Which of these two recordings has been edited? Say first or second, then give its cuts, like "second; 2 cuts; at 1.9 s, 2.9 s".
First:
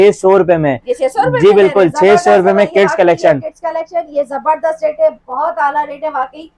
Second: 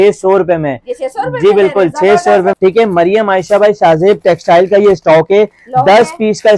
second; 1 cut; at 2.5 s